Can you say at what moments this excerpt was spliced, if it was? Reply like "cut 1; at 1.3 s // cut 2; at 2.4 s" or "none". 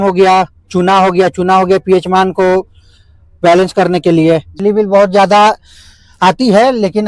cut 1; at 4.5 s